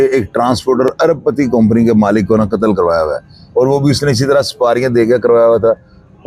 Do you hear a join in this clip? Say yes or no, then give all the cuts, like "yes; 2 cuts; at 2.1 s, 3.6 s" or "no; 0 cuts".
no; 0 cuts